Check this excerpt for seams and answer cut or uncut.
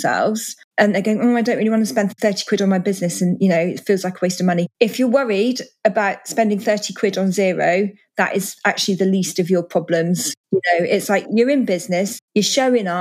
uncut